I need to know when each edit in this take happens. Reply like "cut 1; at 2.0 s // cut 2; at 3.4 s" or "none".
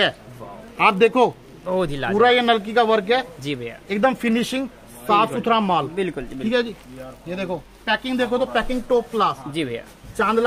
none